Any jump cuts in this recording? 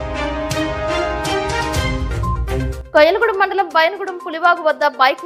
no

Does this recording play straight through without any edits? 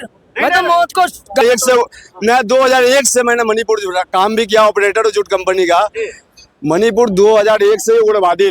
no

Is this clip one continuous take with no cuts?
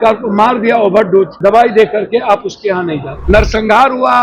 no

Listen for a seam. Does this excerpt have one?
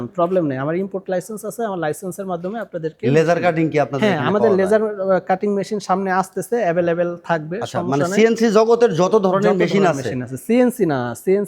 no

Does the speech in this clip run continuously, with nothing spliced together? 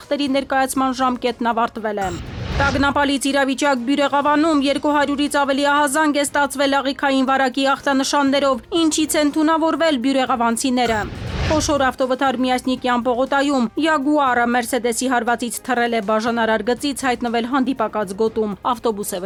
yes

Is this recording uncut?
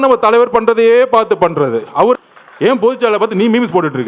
no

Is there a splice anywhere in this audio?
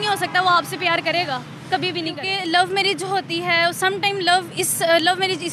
yes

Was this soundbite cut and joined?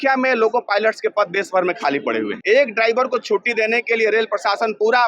yes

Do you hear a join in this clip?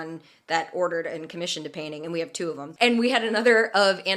yes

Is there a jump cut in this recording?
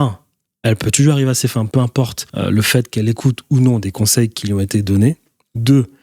yes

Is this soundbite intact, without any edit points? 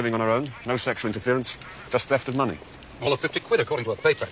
no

